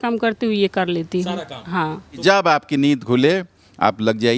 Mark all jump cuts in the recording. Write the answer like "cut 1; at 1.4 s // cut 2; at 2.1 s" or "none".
cut 1; at 2.2 s